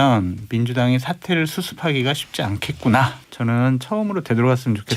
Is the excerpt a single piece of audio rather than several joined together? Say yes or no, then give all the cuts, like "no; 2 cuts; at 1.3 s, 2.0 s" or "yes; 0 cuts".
no; 1 cut; at 3.2 s